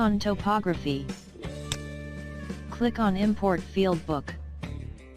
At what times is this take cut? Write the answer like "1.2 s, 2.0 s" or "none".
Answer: 4.2 s